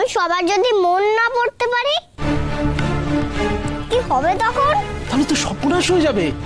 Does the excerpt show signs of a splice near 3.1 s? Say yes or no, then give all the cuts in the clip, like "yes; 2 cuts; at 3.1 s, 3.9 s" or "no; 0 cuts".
no; 1 cut; at 5.0 s